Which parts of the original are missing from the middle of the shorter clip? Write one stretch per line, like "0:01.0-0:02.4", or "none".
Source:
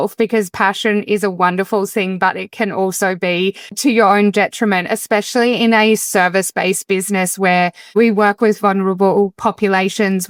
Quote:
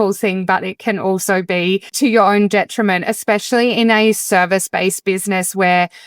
0:03.6-0:03.7